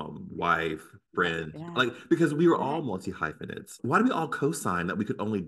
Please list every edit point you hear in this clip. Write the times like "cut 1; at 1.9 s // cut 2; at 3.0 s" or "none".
cut 1; at 3.7 s